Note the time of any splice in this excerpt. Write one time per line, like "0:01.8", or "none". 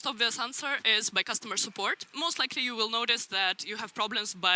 0:02.1